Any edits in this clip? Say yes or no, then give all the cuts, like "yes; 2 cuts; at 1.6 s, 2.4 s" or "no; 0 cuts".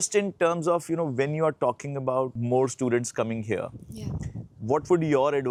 no; 0 cuts